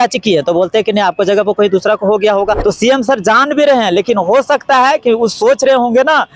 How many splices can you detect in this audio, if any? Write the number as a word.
one